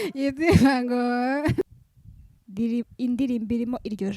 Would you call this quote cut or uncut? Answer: cut